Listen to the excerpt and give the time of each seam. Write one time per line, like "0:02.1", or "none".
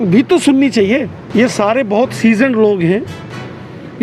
0:01.2